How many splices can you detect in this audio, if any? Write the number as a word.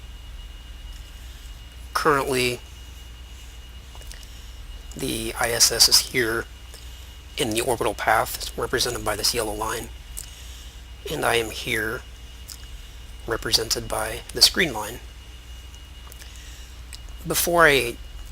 one